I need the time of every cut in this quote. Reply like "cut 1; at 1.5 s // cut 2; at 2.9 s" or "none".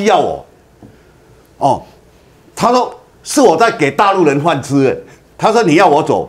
cut 1; at 5.2 s